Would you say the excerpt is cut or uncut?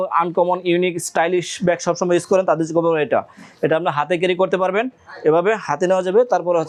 uncut